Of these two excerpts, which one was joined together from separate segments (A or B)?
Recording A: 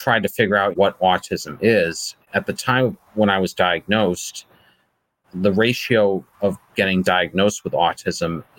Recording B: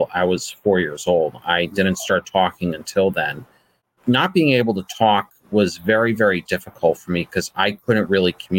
A